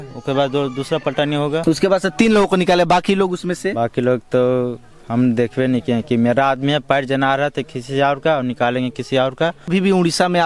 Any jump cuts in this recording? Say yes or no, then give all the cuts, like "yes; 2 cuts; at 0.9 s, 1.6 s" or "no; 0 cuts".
yes; 2 cuts; at 1.6 s, 9.7 s